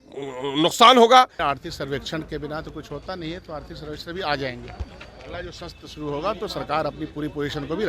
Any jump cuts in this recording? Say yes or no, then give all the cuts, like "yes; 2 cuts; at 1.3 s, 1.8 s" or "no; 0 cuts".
yes; 1 cut; at 1.4 s